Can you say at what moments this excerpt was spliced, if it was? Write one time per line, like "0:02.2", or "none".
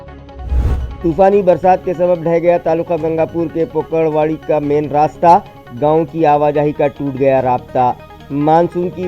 0:01.0